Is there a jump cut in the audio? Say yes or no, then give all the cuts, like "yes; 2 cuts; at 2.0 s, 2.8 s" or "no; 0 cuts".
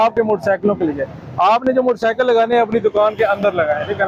no; 0 cuts